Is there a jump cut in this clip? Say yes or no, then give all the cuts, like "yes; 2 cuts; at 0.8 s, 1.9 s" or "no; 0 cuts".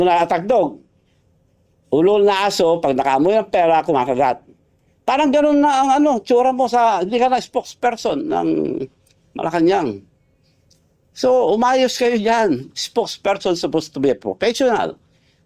no; 0 cuts